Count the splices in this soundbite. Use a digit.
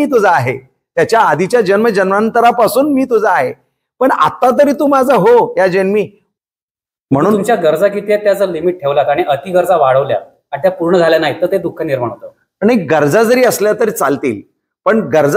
1